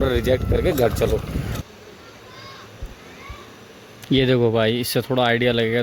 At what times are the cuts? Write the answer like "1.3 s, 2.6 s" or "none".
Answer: 1.6 s